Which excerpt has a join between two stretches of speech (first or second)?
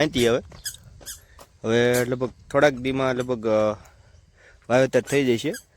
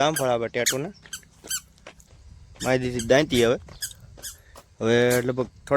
second